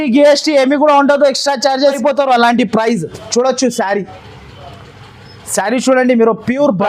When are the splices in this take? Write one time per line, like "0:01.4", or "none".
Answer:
0:02.0